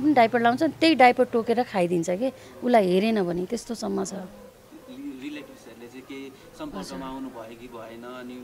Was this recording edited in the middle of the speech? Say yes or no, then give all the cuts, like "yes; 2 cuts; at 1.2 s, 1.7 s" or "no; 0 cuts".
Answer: no; 0 cuts